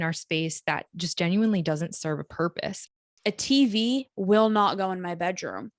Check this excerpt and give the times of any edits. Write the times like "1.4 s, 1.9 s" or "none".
2.9 s